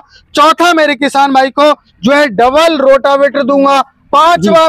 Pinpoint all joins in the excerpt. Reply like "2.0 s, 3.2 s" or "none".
none